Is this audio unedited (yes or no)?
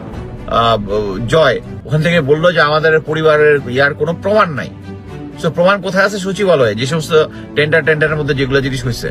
yes